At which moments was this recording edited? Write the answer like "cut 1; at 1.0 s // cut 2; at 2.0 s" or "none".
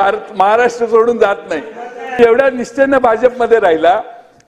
cut 1; at 2.2 s